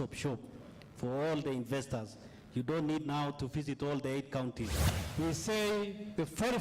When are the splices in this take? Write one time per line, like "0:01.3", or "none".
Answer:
0:04.8